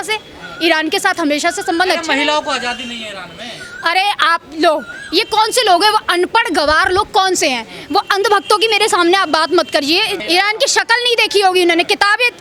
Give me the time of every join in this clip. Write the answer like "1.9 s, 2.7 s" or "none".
none